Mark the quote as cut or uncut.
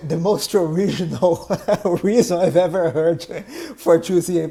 uncut